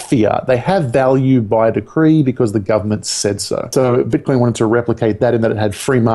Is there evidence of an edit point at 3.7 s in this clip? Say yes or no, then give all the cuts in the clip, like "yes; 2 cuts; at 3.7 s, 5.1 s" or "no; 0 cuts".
yes; 1 cut; at 3.7 s